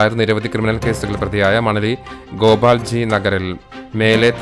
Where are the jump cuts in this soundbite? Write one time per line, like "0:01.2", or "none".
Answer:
none